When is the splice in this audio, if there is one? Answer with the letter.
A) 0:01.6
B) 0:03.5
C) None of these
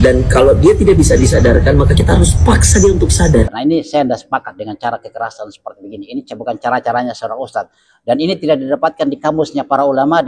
B